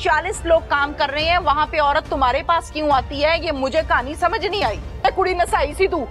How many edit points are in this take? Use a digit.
1